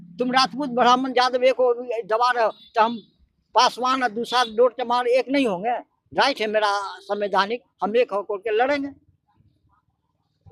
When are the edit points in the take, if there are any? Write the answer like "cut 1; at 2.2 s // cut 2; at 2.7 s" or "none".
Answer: none